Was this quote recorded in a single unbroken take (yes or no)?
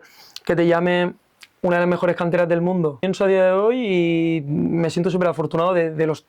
no